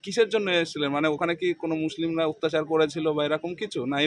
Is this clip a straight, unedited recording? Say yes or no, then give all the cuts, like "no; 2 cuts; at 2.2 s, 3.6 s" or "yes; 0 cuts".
yes; 0 cuts